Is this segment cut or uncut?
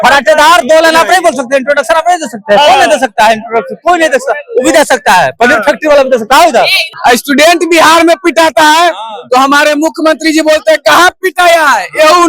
cut